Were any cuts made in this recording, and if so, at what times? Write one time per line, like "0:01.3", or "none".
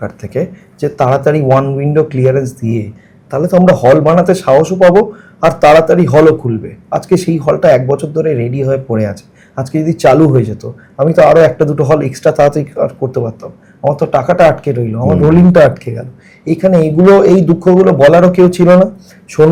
none